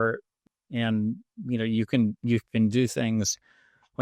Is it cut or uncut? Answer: uncut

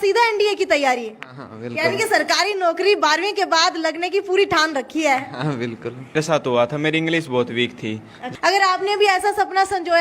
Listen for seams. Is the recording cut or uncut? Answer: cut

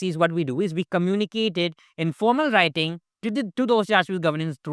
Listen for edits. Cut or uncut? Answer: uncut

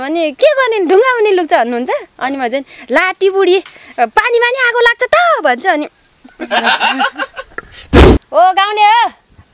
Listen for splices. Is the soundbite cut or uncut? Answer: cut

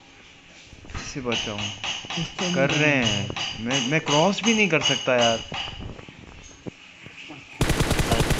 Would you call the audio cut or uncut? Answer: cut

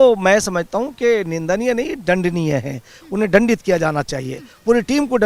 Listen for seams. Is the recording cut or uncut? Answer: uncut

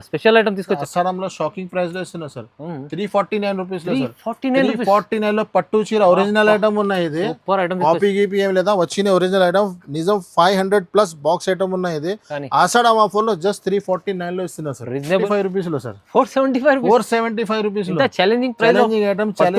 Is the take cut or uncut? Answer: cut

